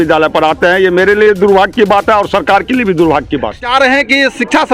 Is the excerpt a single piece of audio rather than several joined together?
no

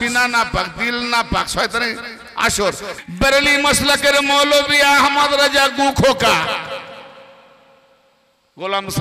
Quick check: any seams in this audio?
yes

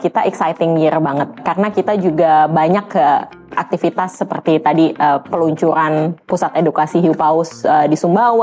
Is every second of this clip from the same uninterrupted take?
no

